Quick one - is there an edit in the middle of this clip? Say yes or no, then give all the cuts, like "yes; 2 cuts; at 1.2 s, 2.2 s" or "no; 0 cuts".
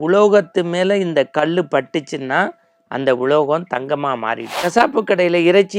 yes; 1 cut; at 4.5 s